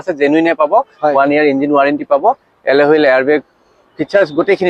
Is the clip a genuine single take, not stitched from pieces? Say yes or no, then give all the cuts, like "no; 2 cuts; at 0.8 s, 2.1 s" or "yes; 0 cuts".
yes; 0 cuts